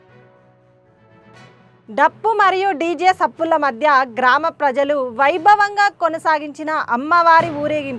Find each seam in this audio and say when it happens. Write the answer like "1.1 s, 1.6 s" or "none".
none

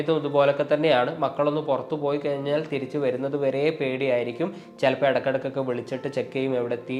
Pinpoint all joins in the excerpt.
none

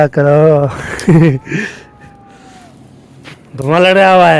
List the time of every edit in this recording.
none

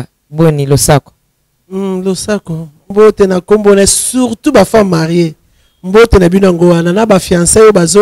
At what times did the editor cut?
2.9 s

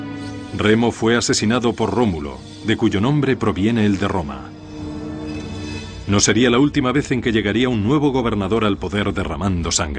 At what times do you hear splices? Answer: 5.8 s

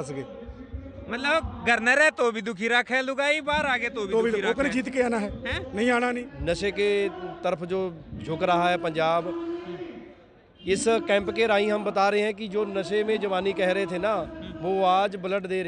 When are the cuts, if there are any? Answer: 6.3 s

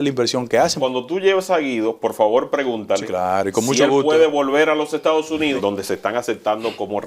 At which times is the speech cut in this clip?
0.8 s, 5.6 s

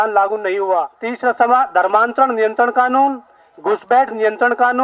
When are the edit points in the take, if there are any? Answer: 1.0 s

